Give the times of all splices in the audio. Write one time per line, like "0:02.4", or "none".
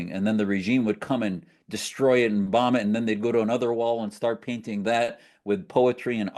none